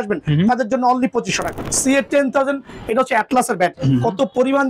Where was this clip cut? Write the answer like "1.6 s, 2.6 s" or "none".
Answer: 1.7 s